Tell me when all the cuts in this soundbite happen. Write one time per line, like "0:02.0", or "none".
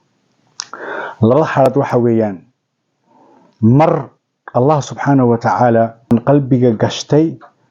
0:06.1